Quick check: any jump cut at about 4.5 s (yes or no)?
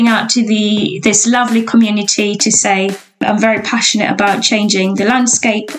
no